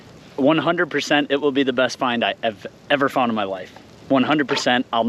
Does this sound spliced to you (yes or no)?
no